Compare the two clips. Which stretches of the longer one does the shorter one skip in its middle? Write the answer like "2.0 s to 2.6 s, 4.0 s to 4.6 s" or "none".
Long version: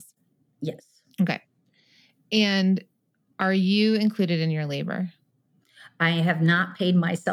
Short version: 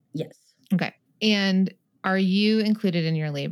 1.5 s to 2.1 s, 3.0 s to 3.2 s